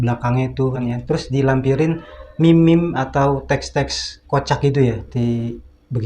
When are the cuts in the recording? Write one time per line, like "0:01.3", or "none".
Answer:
0:00.8
0:05.1